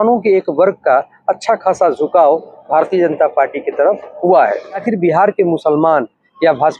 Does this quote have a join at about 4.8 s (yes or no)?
yes